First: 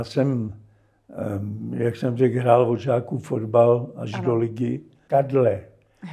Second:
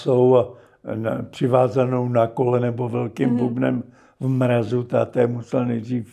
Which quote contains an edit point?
first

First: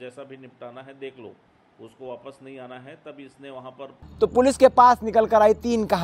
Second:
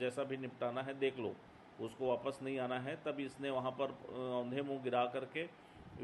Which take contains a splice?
first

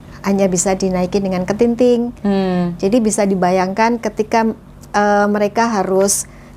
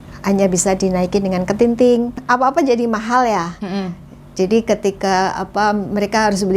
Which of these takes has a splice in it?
second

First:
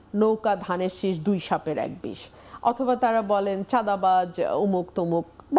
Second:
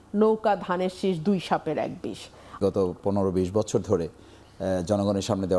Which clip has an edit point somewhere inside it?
second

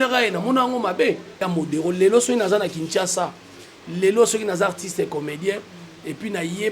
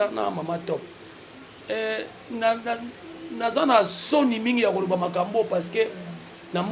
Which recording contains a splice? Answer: first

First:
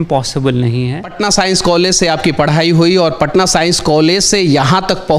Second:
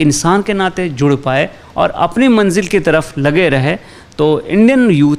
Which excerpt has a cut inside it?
first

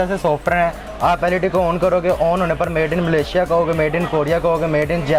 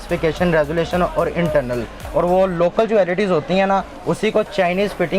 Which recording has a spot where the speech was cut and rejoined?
second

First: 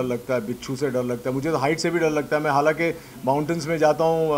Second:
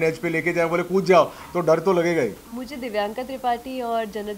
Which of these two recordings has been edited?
second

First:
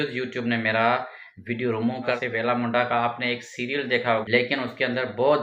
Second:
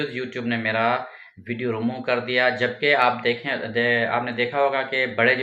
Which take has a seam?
first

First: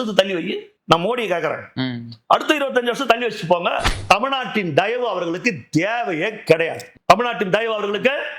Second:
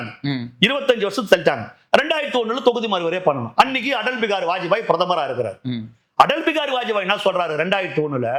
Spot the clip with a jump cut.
first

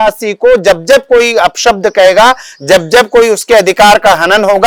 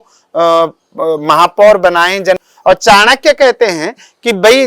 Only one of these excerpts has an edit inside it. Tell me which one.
second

